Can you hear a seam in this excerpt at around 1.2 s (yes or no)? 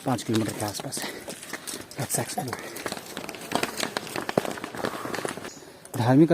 no